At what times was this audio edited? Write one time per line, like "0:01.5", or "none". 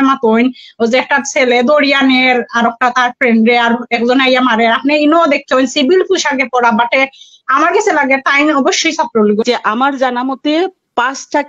0:09.4